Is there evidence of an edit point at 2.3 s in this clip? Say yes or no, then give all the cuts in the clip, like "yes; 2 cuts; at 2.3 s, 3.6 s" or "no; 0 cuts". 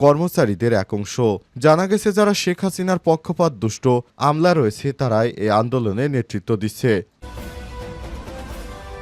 no; 1 cut; at 7.1 s